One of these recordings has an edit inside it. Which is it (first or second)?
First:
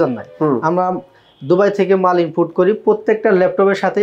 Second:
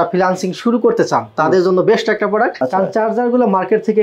second